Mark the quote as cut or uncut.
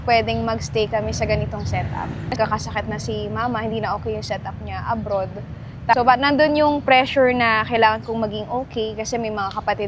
cut